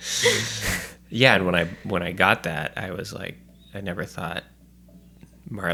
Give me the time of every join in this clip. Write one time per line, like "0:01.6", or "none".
none